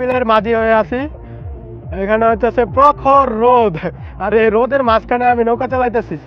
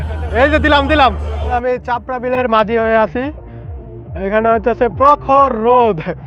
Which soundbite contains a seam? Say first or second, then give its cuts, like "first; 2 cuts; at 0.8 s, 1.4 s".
second; 1 cut; at 1.3 s